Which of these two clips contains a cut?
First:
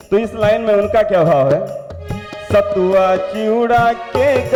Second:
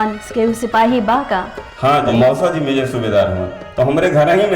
second; 1 cut; at 2.1 s

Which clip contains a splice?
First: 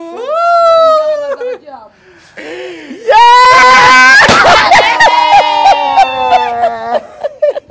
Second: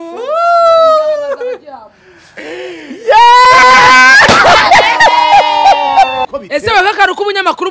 second; 1 cut; at 6.2 s

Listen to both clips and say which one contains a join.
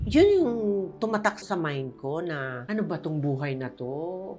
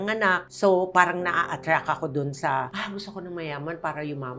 first; 1 cut; at 1.4 s

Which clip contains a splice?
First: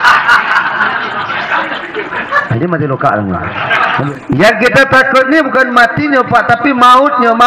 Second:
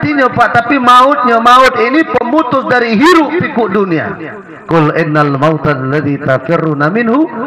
first; 1 cut; at 4.1 s

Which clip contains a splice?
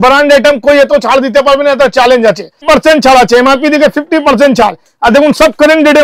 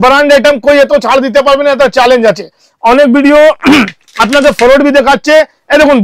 first; 1 cut; at 2.6 s

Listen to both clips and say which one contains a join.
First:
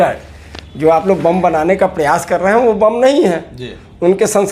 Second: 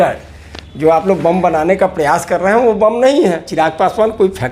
second; 1 cut; at 3.5 s

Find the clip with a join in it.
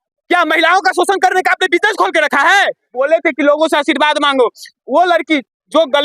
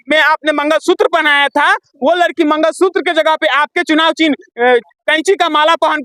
first; 1 cut; at 2.9 s

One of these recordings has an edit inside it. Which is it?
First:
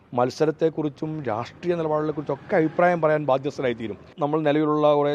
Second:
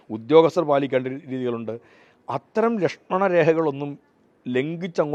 first; 1 cut; at 4.1 s

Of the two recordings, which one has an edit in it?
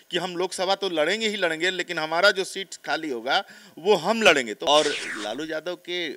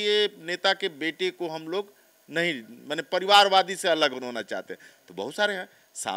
first; 1 cut; at 4.6 s

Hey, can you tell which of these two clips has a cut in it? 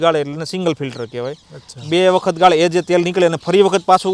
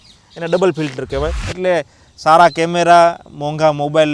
second; 1 cut; at 1.4 s

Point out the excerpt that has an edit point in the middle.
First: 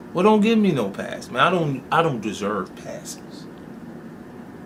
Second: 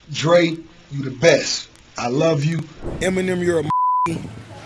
second; 1 cut; at 2.8 s

